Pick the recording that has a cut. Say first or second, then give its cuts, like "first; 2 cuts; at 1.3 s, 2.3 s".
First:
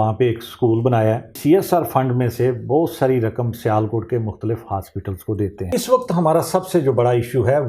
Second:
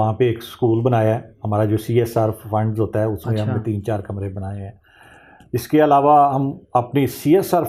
first; 2 cuts; at 1.3 s, 5.7 s